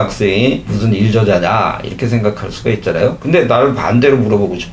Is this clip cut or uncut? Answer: uncut